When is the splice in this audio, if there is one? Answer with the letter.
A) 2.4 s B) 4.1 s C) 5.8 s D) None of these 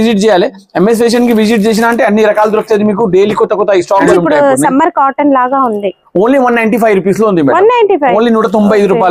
B